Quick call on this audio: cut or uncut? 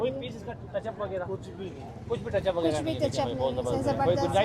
uncut